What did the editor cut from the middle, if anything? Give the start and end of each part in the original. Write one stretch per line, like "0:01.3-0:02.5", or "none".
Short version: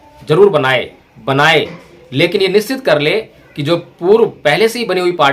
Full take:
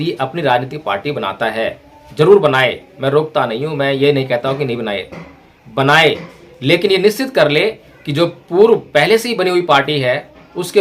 0:02.9-0:05.5